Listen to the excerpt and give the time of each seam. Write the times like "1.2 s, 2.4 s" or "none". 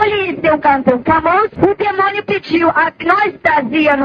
1.5 s